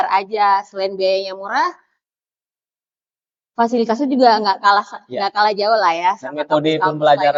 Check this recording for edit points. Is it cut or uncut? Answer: uncut